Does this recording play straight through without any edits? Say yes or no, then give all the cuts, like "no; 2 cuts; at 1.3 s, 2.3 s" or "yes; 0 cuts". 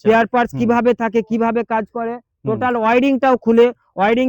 yes; 0 cuts